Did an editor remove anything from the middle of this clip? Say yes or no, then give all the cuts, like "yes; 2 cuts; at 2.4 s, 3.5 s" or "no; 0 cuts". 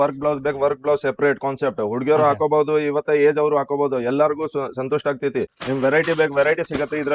yes; 1 cut; at 5.5 s